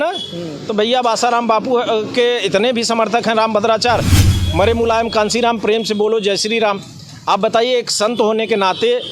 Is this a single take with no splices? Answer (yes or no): no